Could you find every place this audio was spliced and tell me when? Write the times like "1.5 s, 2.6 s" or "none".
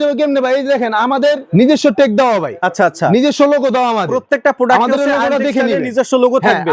1.4 s